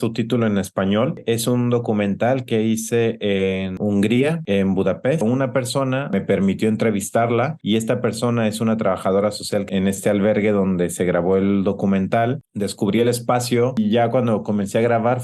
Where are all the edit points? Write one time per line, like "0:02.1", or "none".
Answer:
0:05.2
0:13.8